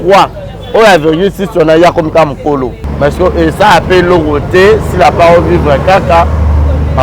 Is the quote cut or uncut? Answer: cut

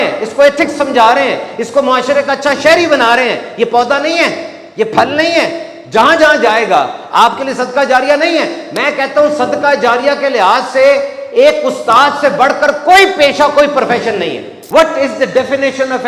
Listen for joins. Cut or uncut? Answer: cut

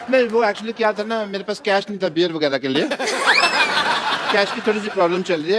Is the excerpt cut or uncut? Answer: uncut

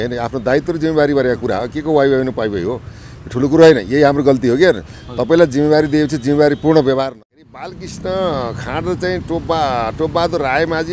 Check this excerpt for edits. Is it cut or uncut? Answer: cut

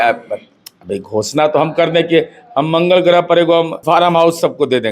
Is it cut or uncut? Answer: cut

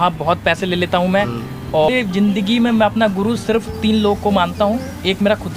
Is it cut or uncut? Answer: cut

